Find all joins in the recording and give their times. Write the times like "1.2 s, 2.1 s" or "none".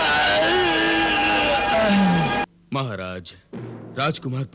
2.4 s